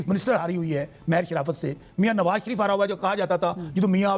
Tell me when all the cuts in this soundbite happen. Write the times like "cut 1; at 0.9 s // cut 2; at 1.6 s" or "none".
none